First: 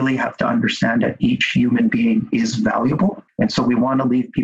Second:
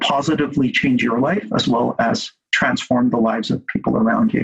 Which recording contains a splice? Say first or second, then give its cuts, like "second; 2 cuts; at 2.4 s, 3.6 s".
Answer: first; 1 cut; at 3.2 s